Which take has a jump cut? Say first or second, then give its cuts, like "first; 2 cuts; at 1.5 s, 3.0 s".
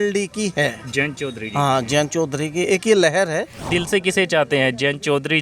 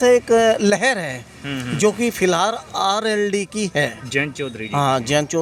first; 1 cut; at 3.6 s